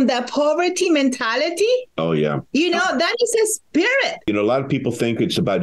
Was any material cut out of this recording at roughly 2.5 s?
no; 1 cut; at 4.3 s

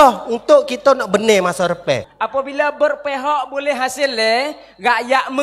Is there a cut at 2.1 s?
yes; 1 cut; at 2.1 s

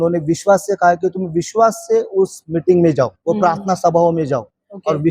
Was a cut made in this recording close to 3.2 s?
yes; 1 cut; at 3.2 s

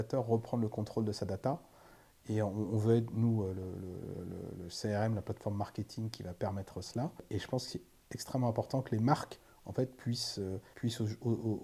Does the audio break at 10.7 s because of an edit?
yes; 2 cuts; at 7.2 s, 10.7 s

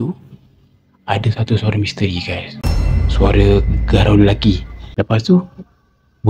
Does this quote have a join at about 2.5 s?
no; 1 cut; at 4.8 s

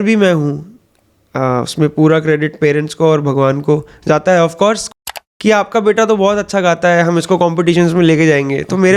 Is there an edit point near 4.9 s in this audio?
yes; 1 cut; at 4.9 s

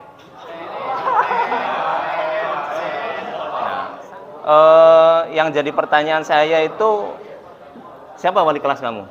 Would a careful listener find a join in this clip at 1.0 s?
no; 1 cut; at 3.8 s

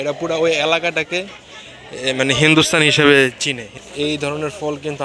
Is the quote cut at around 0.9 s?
no; 1 cut; at 3.7 s

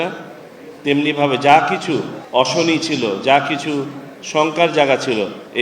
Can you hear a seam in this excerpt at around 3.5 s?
no; 1 cut; at 2.2 s

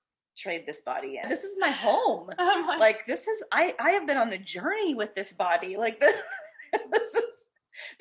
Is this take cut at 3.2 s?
no; 1 cut; at 1.3 s

